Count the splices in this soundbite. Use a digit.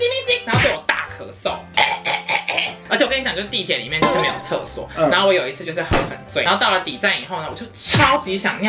2